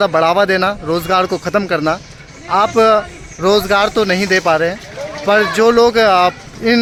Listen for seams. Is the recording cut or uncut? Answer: uncut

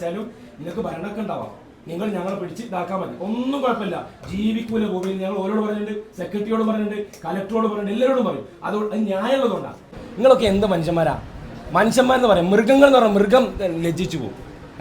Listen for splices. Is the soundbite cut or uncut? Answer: cut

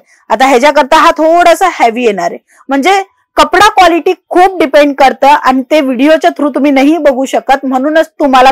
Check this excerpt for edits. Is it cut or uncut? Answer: uncut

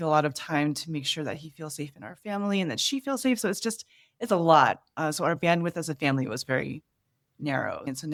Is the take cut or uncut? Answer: uncut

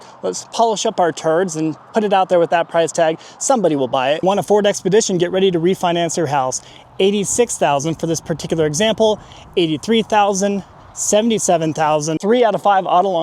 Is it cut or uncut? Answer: cut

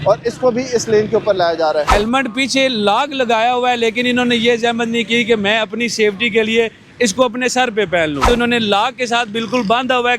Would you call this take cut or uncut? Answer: cut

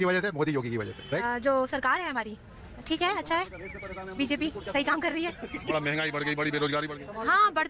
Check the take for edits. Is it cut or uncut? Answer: cut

